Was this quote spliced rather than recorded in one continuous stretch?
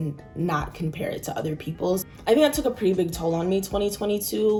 no; 0 cuts

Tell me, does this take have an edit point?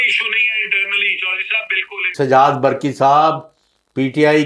yes; 1 cut; at 2.0 s

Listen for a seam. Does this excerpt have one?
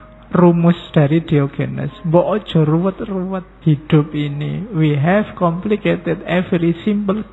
yes; 1 cut; at 3.5 s

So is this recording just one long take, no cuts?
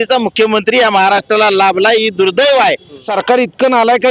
no; 1 cut; at 3.1 s

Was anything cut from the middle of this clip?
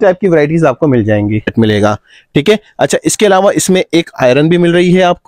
yes; 1 cut; at 1.5 s

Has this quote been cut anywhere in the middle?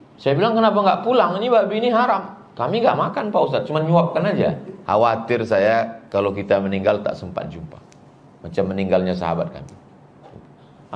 yes; 1 cut; at 4.7 s

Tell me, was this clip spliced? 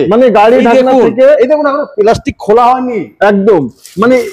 no; 0 cuts

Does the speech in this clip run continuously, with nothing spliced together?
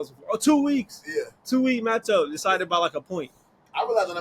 yes; 0 cuts

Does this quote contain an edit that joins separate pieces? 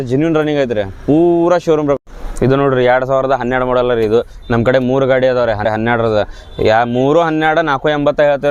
yes; 2 cuts; at 2.0 s, 5.6 s

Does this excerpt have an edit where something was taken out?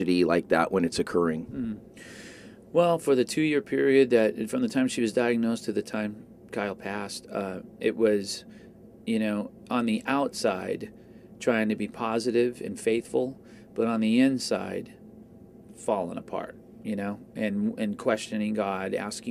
no; 0 cuts

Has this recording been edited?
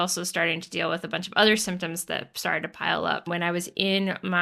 yes; 1 cut; at 3.3 s

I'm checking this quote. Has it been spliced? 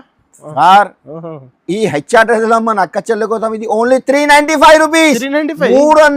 no; 0 cuts

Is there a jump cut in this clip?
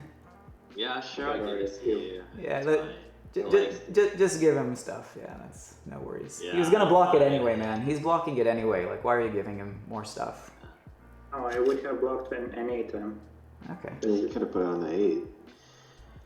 no; 0 cuts

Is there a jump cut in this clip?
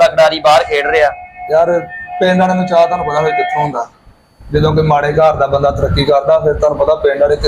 no; 0 cuts

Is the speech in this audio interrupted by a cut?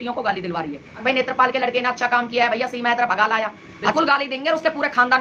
yes; 2 cuts; at 0.9 s, 3.9 s

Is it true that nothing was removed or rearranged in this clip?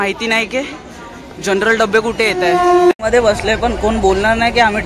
no; 1 cut; at 2.9 s

